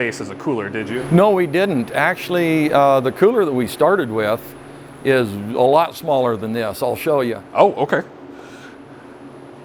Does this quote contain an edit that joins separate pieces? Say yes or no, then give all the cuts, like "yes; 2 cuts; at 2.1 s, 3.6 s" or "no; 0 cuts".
no; 0 cuts